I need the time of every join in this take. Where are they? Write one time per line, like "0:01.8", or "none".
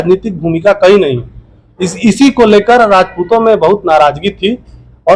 none